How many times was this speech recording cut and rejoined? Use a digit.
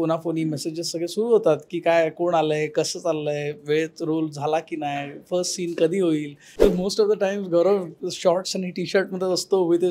1